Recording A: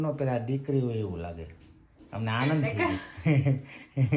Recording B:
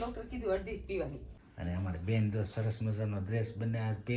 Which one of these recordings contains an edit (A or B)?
B